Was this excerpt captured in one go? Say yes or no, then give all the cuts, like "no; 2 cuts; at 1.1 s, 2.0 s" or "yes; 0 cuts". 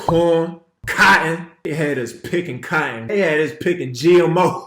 no; 2 cuts; at 0.9 s, 1.5 s